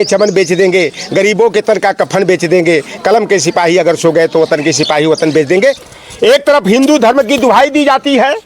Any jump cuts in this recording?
yes; 1 cut; at 5.8 s

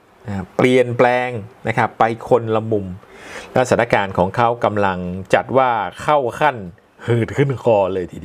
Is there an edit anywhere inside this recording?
no; 0 cuts

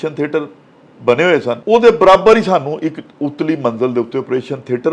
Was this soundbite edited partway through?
yes; 1 cut; at 1.6 s

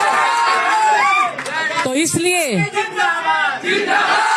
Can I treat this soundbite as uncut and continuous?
yes; 0 cuts

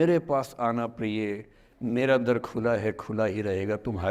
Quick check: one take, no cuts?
yes; 0 cuts

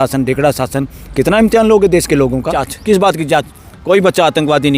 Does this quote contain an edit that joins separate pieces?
yes; 1 cut; at 2.7 s

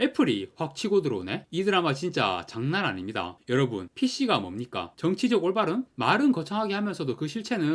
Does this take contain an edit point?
no; 0 cuts

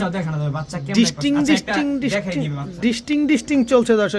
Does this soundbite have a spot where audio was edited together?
no; 0 cuts

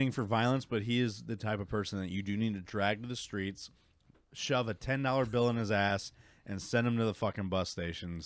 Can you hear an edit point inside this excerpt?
no; 0 cuts

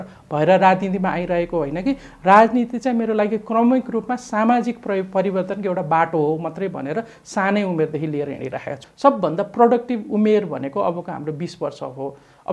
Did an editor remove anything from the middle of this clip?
yes; 1 cut; at 8.8 s

